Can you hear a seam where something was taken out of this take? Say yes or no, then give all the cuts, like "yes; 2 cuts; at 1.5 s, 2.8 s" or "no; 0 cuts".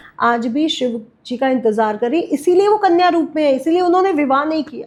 no; 0 cuts